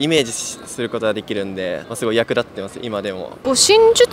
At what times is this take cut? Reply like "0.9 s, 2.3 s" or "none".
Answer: 1.9 s, 3.3 s